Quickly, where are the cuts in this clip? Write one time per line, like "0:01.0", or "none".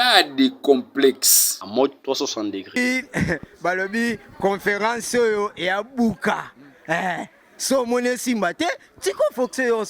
0:02.8